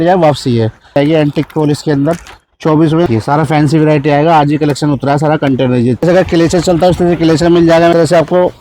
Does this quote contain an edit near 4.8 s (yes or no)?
no